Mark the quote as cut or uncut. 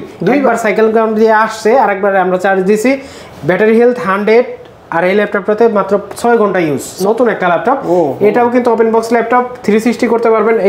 cut